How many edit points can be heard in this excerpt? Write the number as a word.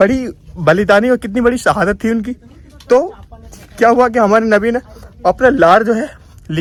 zero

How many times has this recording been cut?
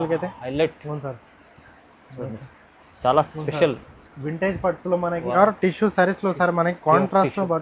one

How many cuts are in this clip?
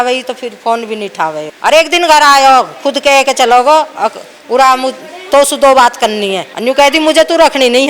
two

